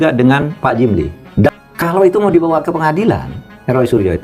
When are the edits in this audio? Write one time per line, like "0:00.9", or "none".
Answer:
0:01.5

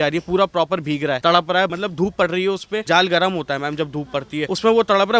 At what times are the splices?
0:01.2
0:01.7
0:02.8
0:04.5

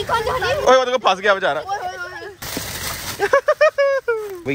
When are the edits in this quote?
none

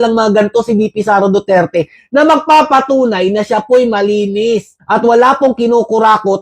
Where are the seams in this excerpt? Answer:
none

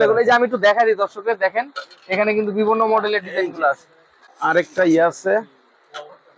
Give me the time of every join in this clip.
none

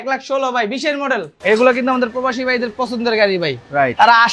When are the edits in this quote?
0:01.3

